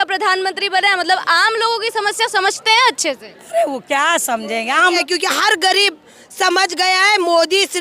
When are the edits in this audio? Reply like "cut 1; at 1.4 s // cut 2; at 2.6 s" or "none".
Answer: cut 1; at 5.0 s